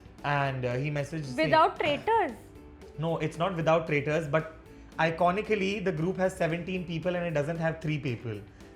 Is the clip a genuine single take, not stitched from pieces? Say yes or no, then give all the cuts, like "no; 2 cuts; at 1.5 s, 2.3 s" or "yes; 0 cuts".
yes; 0 cuts